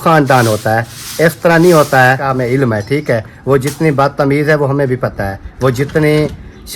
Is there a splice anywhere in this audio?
yes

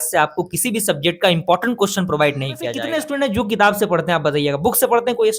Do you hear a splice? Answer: yes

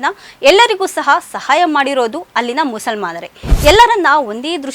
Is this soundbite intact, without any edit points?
no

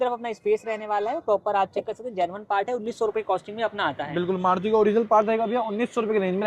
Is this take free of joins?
yes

